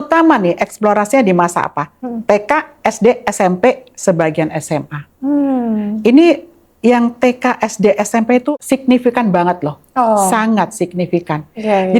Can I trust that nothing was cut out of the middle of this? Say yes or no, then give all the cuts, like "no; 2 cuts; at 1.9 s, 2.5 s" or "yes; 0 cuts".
yes; 0 cuts